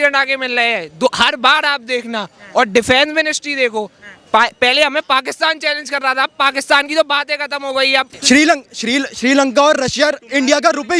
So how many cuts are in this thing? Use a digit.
1